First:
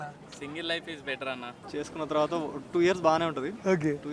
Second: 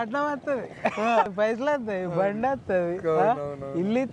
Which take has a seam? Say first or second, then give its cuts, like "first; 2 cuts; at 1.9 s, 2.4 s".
first; 1 cut; at 1.5 s